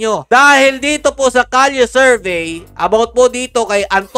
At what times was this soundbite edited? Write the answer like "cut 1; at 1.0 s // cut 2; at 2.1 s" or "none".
none